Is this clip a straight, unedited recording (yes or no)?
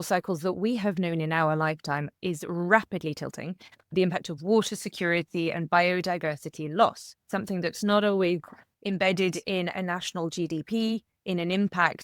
no